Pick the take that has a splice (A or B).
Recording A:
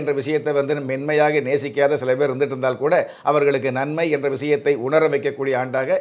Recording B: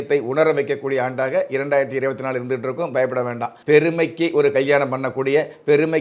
B